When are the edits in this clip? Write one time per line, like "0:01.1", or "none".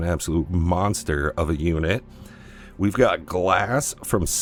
none